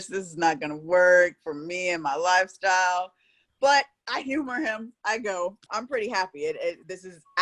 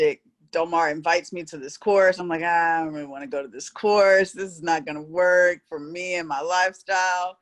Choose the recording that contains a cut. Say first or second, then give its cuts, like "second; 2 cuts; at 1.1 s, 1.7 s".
first; 1 cut; at 5.6 s